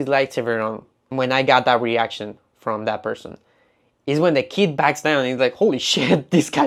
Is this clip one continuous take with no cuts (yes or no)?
yes